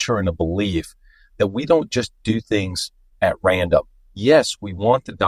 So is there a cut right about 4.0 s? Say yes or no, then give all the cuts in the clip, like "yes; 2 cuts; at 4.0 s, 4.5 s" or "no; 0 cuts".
yes; 1 cut; at 4.0 s